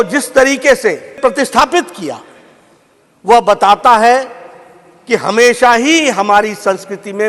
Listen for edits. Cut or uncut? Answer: cut